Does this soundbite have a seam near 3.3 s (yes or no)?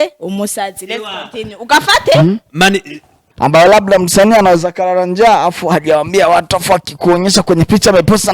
yes